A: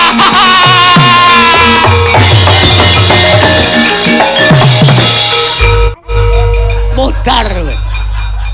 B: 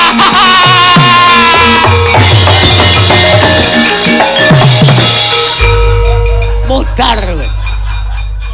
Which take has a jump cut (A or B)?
B